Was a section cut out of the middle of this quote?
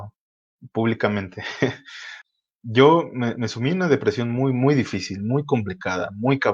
yes; 1 cut; at 2.1 s

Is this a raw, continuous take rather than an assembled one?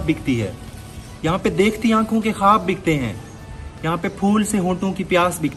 yes; 0 cuts

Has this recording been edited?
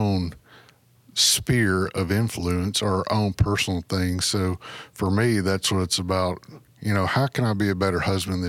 no; 0 cuts

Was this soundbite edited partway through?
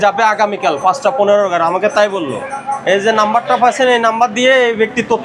no; 0 cuts

